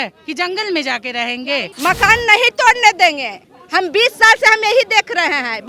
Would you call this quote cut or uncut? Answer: cut